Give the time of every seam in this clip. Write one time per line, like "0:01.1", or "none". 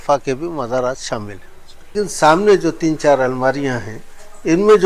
0:01.9

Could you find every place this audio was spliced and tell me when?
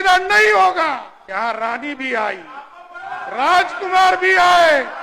0:01.1

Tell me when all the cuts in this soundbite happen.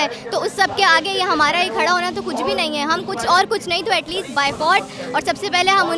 none

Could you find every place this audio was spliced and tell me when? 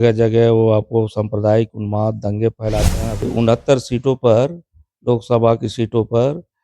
0:03.2

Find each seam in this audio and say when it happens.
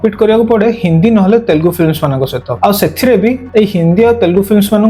0:02.4
0:03.4

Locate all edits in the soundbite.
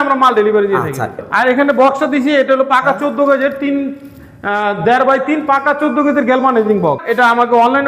0:01.2
0:07.0

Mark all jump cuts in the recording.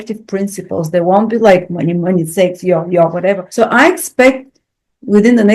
0:03.4

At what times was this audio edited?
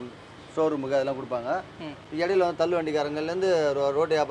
none

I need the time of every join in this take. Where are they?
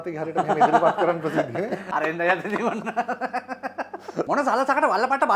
0:01.8
0:04.3

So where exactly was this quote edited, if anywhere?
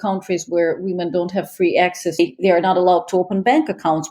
0:02.2

